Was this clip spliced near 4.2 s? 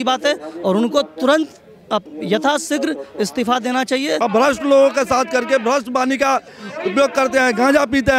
yes; 1 cut; at 4.2 s

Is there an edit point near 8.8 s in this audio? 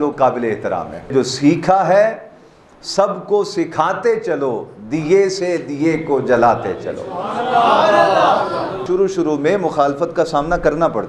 yes; 2 cuts; at 1.1 s, 8.8 s

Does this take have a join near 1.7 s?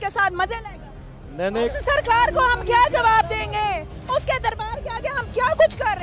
yes; 1 cut; at 1.7 s

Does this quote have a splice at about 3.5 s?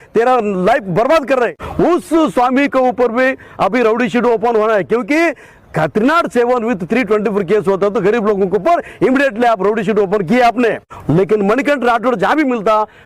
no; 2 cuts; at 1.6 s, 10.9 s

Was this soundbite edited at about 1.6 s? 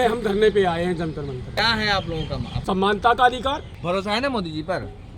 yes; 3 cuts; at 1.6 s, 2.5 s, 3.7 s

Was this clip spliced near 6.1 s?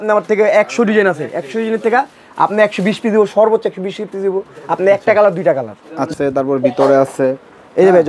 yes; 1 cut; at 6.1 s

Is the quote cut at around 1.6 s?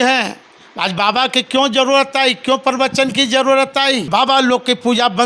no; 1 cut; at 4.1 s

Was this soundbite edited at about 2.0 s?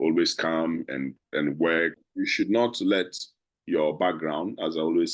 yes; 1 cut; at 2.0 s

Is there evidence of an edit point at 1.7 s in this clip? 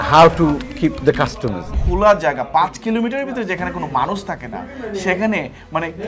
yes; 1 cut; at 1.7 s

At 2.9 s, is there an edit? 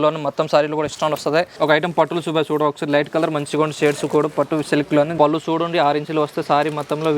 no; 2 cuts; at 1.5 s, 5.1 s

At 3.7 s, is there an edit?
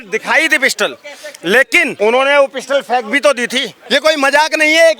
yes; 2 cuts; at 1.9 s, 3.7 s

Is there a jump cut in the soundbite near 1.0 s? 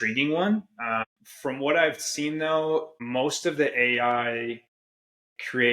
yes; 2 cuts; at 1.0 s, 3.0 s

